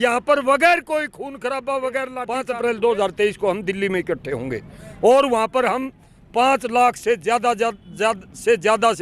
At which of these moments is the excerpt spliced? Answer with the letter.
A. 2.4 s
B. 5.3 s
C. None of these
A